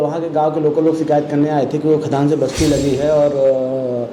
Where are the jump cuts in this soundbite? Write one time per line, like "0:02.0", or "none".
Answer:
none